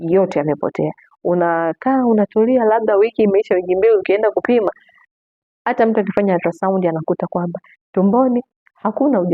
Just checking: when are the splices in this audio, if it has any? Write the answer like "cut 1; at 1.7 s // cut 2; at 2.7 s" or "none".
none